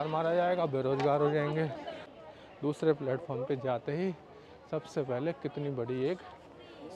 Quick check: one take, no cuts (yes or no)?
no